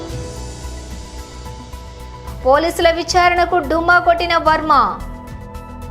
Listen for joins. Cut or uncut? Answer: cut